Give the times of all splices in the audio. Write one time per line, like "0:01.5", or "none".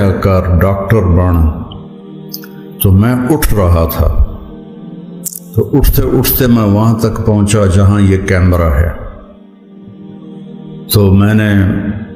0:09.0
0:10.7